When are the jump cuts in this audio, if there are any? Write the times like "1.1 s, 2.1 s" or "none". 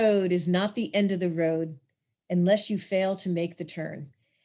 none